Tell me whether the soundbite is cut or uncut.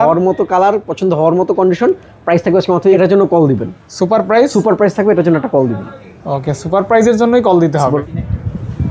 cut